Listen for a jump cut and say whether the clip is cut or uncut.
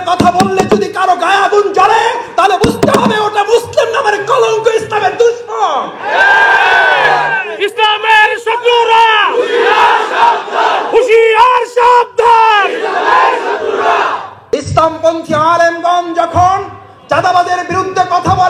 cut